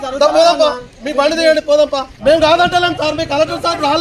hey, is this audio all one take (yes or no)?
no